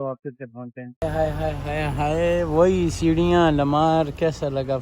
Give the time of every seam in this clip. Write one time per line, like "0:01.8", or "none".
0:01.0